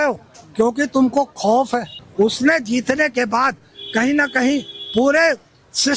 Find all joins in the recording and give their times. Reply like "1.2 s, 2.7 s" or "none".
2.0 s